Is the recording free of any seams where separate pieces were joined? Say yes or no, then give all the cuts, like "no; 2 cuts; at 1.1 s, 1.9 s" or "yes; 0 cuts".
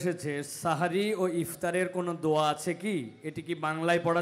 yes; 0 cuts